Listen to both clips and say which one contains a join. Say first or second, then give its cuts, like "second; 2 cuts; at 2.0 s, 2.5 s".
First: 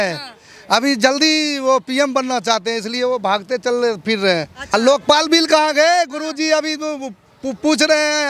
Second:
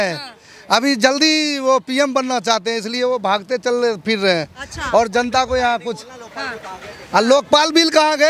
first; 1 cut; at 4.7 s